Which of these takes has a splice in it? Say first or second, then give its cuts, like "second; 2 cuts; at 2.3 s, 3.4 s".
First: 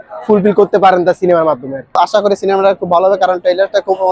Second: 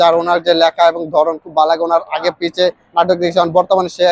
first; 1 cut; at 2.0 s